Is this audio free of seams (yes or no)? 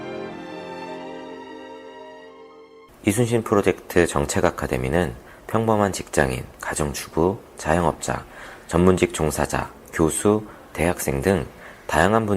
no